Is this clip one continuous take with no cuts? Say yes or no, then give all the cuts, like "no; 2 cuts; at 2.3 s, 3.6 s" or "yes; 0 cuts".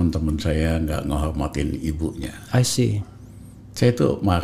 yes; 0 cuts